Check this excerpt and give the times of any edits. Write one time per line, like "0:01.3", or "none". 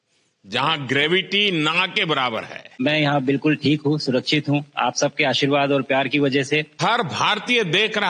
0:03.1
0:06.8